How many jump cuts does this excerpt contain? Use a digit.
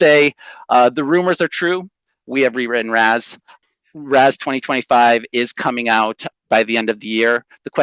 2